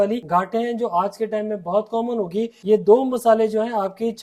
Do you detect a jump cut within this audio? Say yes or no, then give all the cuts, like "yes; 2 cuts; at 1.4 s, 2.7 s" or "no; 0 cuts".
yes; 1 cut; at 2.5 s